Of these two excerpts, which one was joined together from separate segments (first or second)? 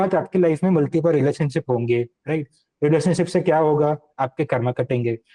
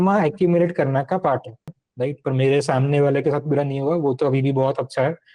second